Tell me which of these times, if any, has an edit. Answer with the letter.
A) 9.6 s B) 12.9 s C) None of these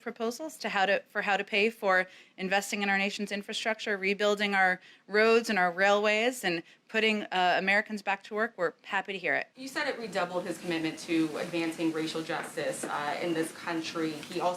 A